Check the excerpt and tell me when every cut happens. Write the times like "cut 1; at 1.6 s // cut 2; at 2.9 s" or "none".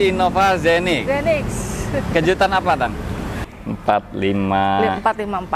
cut 1; at 3.4 s